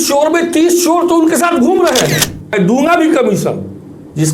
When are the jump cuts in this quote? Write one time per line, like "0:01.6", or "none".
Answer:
0:02.5